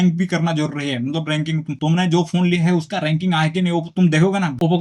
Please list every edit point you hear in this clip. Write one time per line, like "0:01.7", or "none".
none

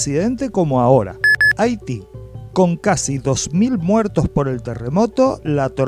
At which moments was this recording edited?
0:01.2

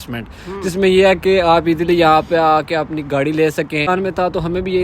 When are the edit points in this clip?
0:03.9

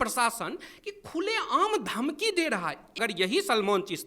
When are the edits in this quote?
0:02.9

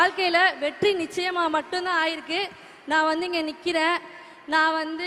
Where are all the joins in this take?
none

